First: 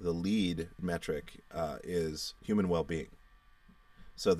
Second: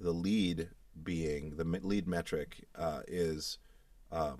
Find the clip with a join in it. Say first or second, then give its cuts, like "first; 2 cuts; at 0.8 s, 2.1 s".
first; 2 cuts; at 0.8 s, 2.3 s